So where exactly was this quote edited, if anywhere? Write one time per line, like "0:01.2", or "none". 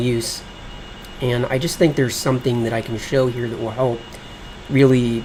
none